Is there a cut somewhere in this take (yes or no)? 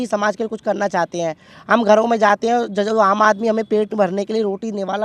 no